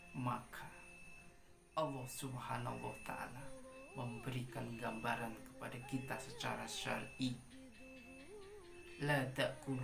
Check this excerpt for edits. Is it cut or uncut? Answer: uncut